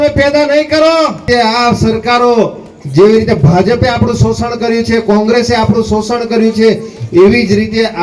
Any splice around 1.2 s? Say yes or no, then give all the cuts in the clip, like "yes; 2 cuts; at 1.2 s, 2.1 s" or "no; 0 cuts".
yes; 1 cut; at 1.2 s